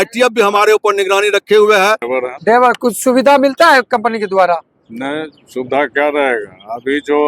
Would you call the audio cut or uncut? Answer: cut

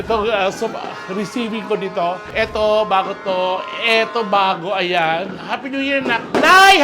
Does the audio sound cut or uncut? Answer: cut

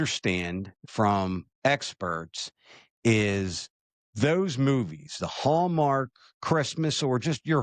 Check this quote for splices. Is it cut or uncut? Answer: uncut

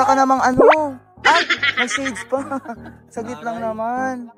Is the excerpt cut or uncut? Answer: uncut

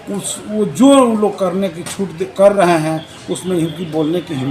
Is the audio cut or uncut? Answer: uncut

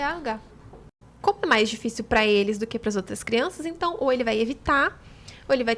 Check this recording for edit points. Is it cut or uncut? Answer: cut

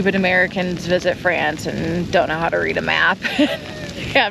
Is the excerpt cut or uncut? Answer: uncut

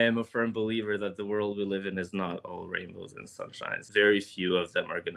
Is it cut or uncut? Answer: cut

